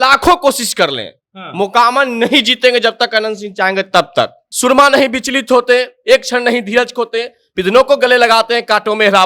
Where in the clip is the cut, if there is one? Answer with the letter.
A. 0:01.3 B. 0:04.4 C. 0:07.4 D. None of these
B